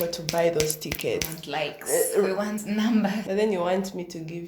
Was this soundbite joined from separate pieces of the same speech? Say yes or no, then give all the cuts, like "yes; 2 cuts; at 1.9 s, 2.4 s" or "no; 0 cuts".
yes; 1 cut; at 3.2 s